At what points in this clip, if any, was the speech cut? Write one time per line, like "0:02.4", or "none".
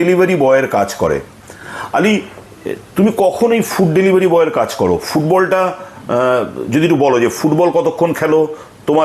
none